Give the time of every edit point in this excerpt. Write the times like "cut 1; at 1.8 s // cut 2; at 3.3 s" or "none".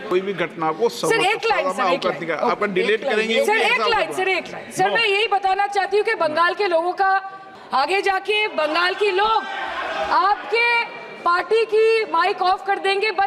none